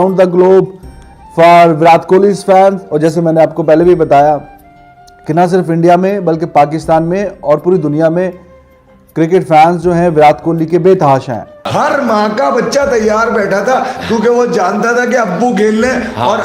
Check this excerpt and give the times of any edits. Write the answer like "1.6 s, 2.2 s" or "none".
11.6 s